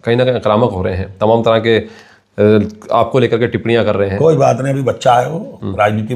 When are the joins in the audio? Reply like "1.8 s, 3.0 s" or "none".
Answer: none